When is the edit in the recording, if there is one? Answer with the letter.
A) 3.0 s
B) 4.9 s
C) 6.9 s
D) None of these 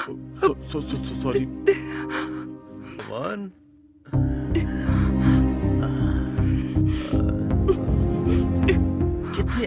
A